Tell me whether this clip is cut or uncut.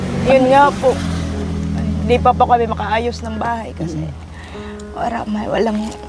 uncut